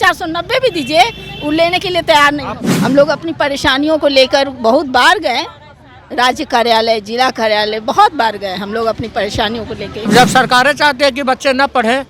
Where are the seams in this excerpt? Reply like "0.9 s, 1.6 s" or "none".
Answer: 2.5 s, 10.1 s